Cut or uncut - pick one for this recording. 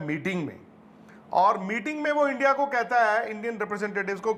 uncut